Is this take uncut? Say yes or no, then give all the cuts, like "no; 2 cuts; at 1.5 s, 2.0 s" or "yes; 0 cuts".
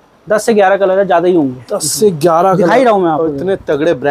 yes; 0 cuts